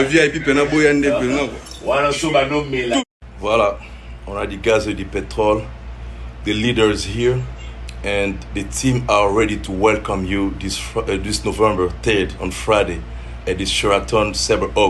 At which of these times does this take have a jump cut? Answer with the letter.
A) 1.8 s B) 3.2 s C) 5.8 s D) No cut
B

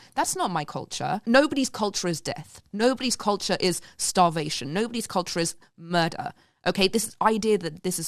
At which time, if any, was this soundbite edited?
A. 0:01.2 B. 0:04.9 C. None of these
A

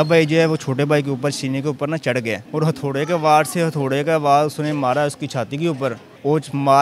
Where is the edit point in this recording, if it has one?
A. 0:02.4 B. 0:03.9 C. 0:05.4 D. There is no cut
A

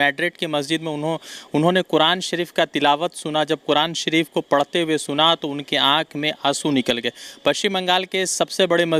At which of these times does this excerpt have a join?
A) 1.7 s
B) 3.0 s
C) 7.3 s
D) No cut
D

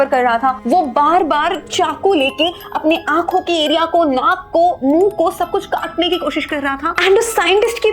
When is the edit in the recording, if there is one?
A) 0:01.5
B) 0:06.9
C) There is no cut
B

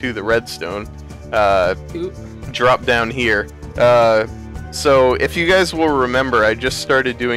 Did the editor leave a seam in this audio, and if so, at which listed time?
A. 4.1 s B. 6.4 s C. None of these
C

